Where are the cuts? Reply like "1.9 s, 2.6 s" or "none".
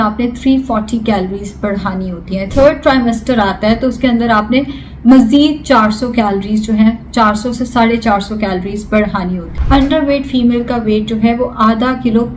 2.5 s, 9.5 s